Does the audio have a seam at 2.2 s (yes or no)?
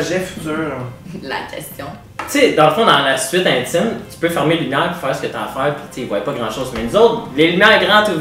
yes